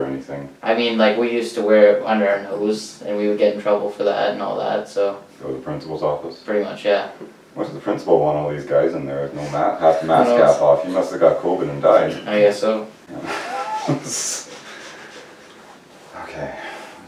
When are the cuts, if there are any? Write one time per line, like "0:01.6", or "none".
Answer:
none